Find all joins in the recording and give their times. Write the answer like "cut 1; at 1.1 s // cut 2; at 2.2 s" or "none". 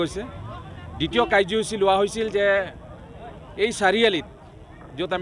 none